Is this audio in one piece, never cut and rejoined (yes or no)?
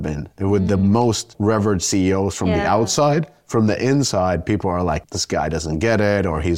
no